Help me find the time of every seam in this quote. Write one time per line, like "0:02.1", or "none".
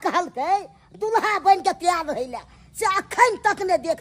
none